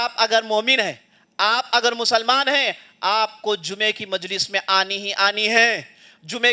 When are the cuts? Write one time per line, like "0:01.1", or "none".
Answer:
none

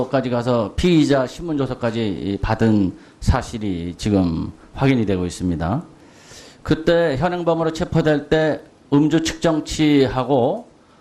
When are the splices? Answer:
none

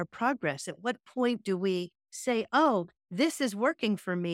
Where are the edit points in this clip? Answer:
none

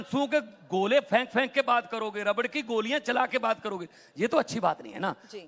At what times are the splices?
none

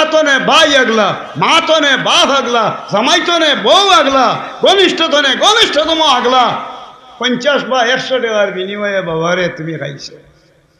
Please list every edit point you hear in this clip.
none

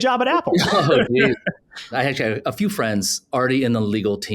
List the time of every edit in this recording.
0:01.9
0:03.2

